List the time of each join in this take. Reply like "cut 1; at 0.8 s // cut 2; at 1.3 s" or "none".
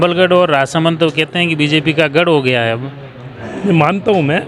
none